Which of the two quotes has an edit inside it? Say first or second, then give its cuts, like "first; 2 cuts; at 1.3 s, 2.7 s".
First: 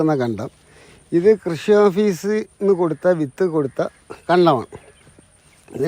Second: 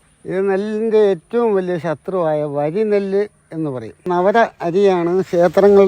second; 1 cut; at 4.0 s